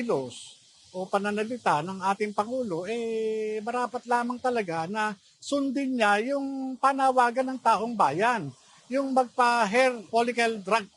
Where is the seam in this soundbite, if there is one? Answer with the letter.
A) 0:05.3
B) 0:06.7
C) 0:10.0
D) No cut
C